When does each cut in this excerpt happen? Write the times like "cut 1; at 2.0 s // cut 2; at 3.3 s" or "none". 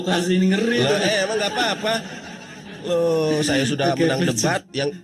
none